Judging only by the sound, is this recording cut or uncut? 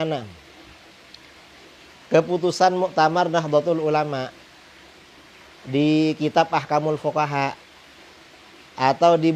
uncut